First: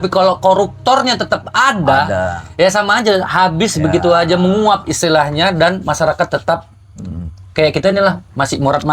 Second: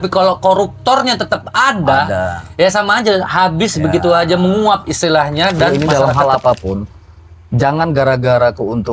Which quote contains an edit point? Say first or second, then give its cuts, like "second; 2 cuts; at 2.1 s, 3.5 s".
second; 1 cut; at 6.0 s